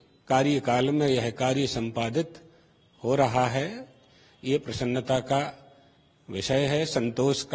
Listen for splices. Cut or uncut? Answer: uncut